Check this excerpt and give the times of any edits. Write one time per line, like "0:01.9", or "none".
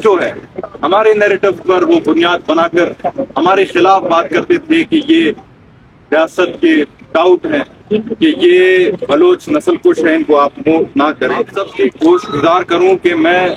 0:11.6

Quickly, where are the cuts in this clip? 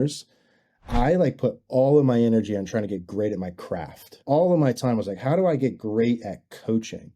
0:04.1

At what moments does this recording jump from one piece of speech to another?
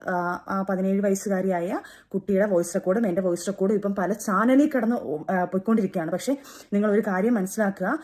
none

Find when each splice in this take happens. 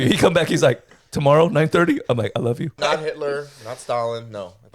0:02.8

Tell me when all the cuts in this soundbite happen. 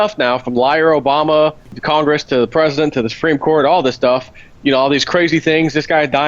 0:01.8

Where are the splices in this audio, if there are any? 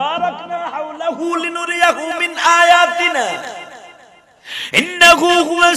none

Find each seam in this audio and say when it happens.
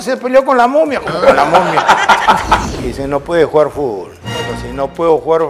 0:02.6
0:04.1

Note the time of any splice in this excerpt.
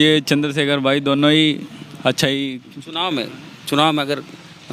none

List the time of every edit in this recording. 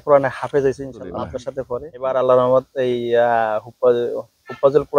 none

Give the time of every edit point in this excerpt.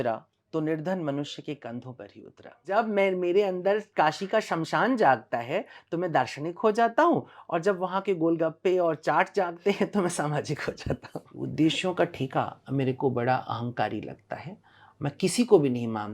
0:02.6
0:11.4

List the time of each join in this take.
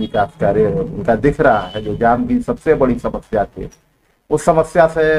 none

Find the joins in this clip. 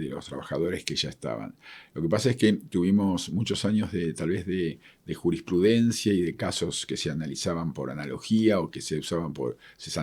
none

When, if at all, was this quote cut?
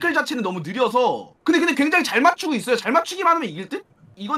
none

